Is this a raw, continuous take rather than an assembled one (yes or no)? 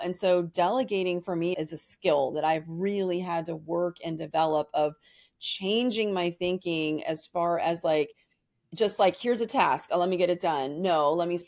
no